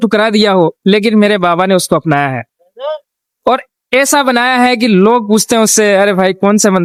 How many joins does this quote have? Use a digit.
0